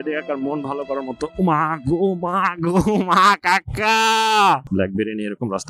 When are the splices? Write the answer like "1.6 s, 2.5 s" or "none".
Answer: 4.6 s